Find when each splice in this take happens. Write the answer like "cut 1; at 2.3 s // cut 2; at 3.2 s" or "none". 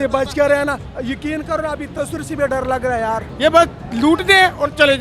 cut 1; at 0.9 s // cut 2; at 3.3 s

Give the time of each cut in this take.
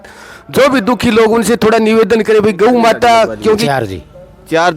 cut 1; at 3.6 s

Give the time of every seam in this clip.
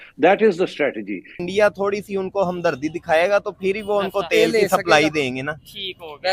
cut 1; at 1.4 s

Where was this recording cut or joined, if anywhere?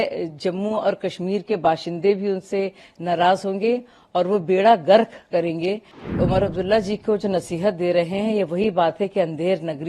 cut 1; at 5.9 s

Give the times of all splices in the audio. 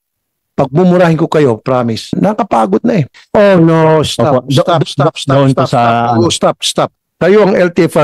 cut 1; at 2.1 s // cut 2; at 3.2 s // cut 3; at 7.0 s

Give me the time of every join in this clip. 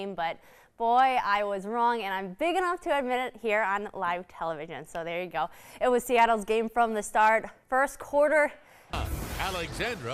cut 1; at 8.9 s

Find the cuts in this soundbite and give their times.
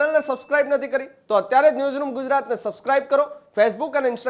none

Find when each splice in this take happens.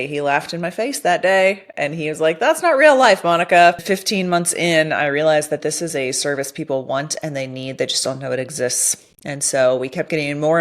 cut 1; at 3.8 s

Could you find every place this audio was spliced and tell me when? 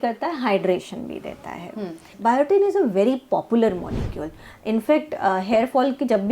cut 1; at 2.1 s

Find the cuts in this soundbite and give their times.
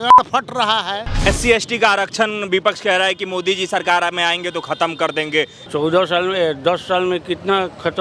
cut 1; at 1.3 s // cut 2; at 5.6 s

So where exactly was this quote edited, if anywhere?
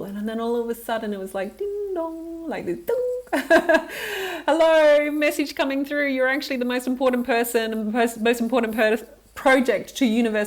none

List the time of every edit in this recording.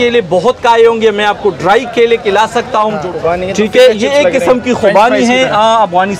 cut 1; at 3.0 s

